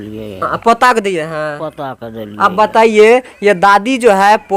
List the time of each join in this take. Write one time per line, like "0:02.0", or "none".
none